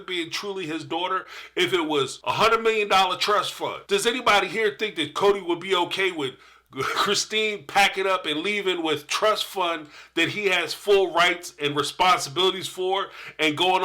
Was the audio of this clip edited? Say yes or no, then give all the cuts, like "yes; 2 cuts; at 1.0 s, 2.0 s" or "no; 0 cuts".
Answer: yes; 2 cuts; at 2.2 s, 3.8 s